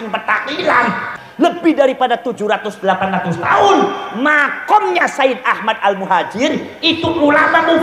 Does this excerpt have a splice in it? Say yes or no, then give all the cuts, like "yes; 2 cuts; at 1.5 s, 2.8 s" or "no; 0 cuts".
yes; 1 cut; at 1.0 s